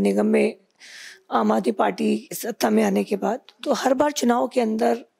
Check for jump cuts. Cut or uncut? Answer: uncut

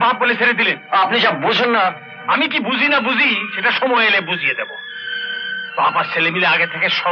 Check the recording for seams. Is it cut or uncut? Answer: uncut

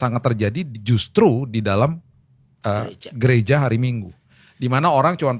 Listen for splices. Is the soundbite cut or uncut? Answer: uncut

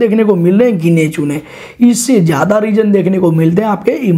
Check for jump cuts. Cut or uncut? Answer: uncut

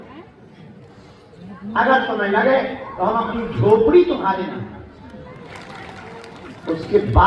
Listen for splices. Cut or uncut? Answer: cut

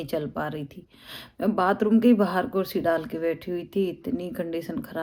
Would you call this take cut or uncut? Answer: uncut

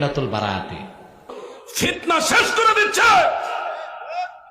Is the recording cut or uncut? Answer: cut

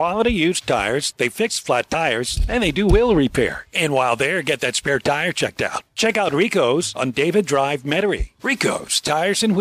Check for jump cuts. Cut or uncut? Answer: uncut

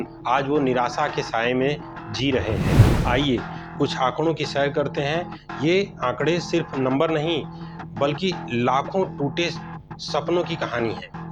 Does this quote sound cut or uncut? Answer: uncut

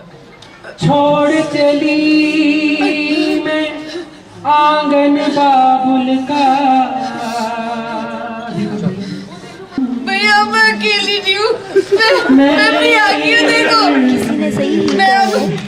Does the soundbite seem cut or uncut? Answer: cut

